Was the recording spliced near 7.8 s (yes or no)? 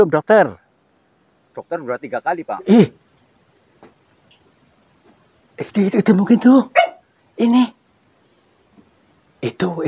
no